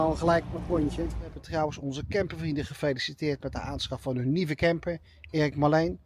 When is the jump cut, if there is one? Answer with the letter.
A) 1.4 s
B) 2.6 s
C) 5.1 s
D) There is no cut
A